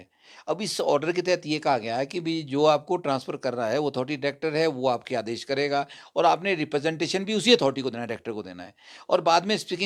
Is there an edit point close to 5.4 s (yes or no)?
no